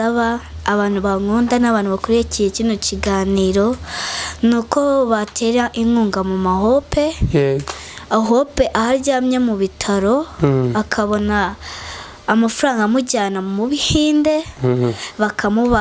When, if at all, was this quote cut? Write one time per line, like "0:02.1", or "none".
none